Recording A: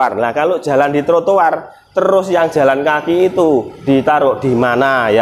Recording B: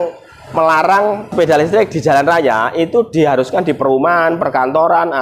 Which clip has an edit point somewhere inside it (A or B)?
B